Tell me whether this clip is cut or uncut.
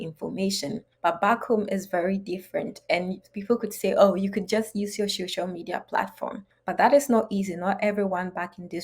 cut